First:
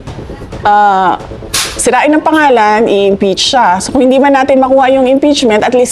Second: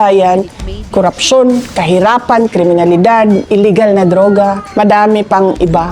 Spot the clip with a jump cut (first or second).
second